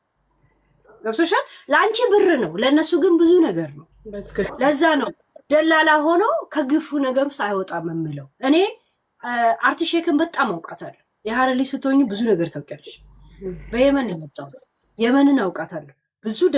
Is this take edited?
no; 0 cuts

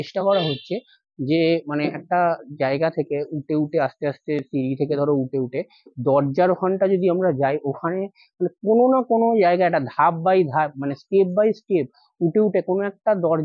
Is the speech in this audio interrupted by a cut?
no; 0 cuts

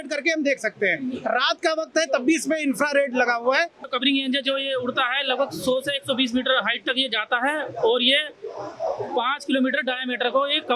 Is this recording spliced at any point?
yes; 1 cut; at 3.8 s

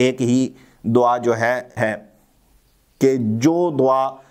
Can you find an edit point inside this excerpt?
yes; 1 cut; at 1.7 s

